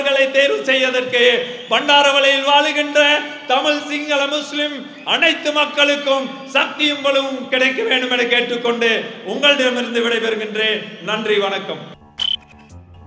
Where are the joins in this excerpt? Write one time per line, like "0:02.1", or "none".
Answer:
0:11.9